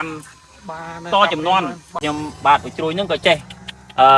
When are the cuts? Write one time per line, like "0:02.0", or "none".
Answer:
0:01.9